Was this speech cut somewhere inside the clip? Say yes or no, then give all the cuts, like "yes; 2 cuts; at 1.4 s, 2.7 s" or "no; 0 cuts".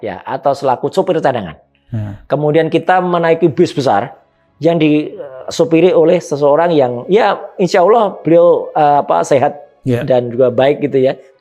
no; 0 cuts